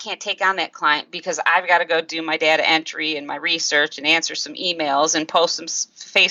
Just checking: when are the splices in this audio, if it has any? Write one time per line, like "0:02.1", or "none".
none